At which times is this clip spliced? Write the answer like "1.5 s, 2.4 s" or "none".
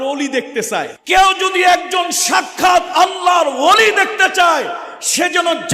0.9 s